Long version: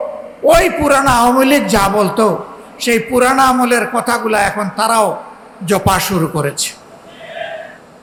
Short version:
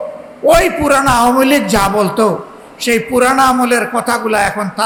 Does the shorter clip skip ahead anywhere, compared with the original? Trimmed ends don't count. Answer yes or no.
no